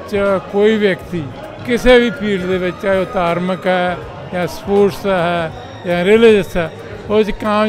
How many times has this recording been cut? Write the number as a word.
zero